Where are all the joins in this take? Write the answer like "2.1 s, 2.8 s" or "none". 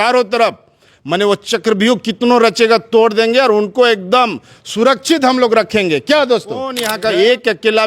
6.9 s